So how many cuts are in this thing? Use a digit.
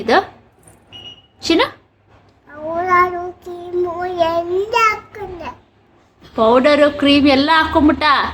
0